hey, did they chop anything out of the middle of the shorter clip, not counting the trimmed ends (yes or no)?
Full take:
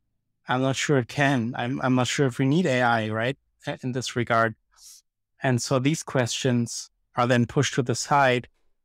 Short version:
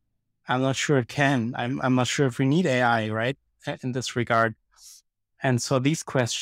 no